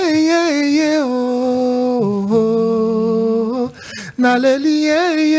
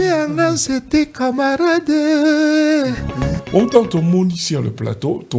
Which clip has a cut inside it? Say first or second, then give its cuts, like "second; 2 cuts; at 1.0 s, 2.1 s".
second; 1 cut; at 3.4 s